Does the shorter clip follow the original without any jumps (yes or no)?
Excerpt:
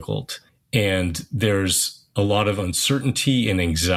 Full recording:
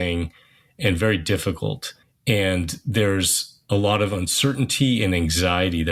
yes